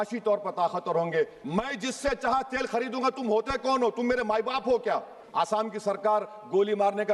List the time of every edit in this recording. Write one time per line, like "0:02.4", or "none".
0:01.4
0:05.2